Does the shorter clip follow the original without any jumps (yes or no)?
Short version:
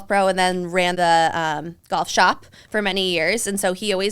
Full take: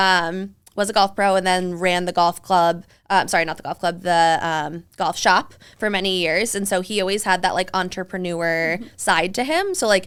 no